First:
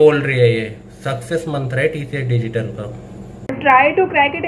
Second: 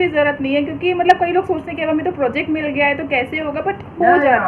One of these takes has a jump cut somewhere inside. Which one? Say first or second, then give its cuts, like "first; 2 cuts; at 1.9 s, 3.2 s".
first; 1 cut; at 3.5 s